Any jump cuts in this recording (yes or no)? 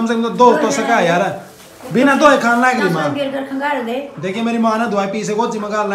no